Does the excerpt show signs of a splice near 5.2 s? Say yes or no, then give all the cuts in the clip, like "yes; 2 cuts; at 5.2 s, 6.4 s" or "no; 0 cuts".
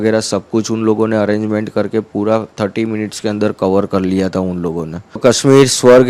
yes; 1 cut; at 5.2 s